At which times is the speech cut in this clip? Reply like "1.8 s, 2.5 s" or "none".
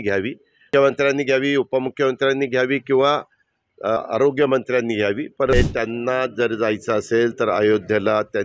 4.1 s, 5.5 s